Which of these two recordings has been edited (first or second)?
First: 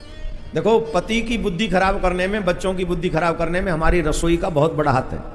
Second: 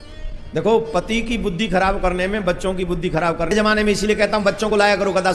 second